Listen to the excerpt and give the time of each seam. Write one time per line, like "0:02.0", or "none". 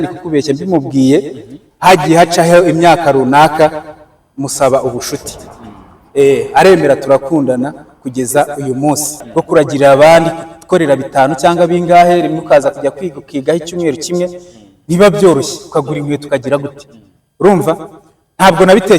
0:09.2

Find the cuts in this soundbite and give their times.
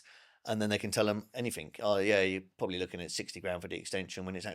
none

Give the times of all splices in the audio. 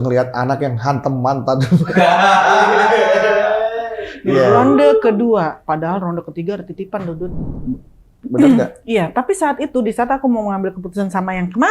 0:07.5

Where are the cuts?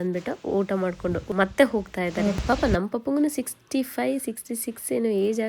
0:01.3
0:02.4

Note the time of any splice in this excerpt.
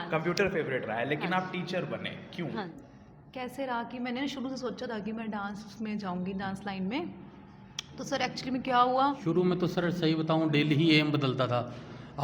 0:02.8
0:09.2

